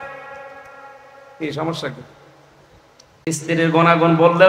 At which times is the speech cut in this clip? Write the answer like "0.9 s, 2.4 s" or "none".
3.3 s